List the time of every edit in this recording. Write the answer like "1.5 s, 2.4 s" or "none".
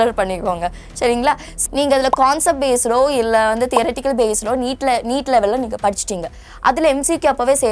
1.5 s